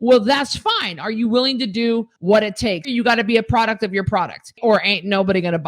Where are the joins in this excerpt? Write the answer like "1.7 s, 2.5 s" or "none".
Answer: 2.8 s